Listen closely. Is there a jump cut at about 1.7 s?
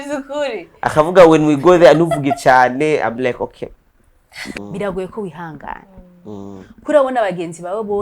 no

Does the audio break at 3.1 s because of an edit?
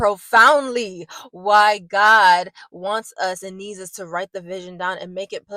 no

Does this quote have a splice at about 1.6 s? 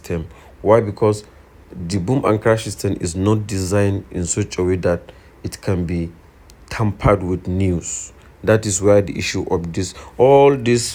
no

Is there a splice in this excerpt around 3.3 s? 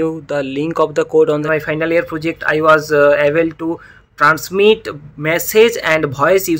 no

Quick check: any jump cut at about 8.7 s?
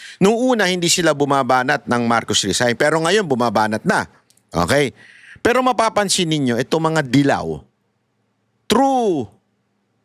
no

